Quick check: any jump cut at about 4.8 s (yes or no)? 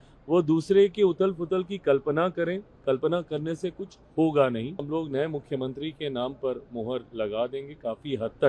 yes